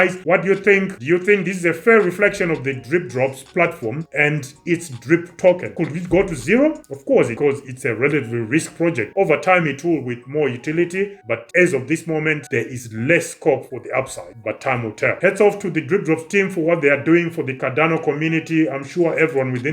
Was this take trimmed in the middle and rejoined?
yes; 2 cuts; at 9.1 s, 15.1 s

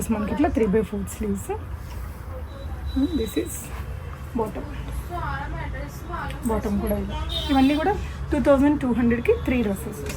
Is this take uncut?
yes; 0 cuts

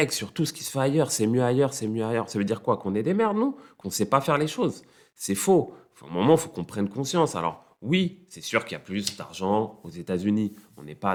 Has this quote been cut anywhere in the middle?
no; 0 cuts

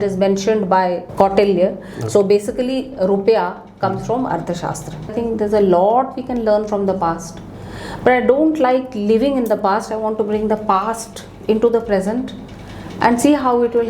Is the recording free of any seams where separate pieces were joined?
no; 2 cuts; at 1.1 s, 5.1 s

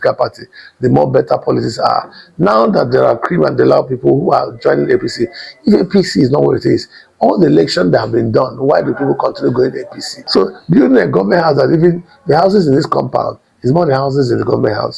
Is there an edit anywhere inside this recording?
yes; 1 cut; at 10.2 s

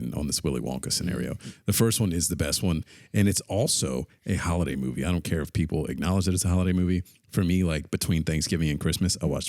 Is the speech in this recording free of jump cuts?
yes; 0 cuts

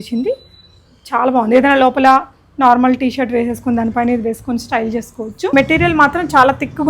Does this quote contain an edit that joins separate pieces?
yes; 1 cut; at 5.5 s

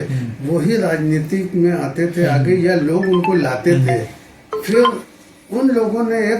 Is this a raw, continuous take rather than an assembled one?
yes; 0 cuts

